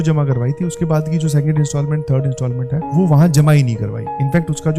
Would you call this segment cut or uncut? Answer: uncut